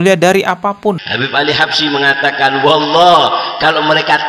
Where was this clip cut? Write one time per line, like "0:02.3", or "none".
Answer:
0:01.1